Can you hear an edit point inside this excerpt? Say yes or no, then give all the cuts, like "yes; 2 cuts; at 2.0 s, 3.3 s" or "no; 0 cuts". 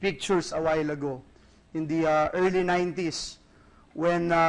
yes; 1 cut; at 1.3 s